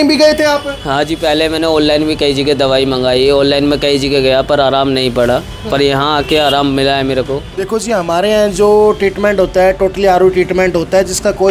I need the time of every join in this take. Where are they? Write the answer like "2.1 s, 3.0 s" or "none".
7.5 s